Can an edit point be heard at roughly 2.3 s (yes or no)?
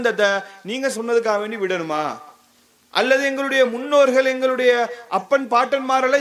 no